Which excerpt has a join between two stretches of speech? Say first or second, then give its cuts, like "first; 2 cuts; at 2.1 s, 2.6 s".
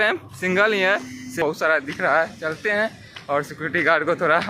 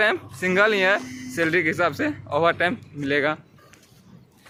first; 1 cut; at 1.4 s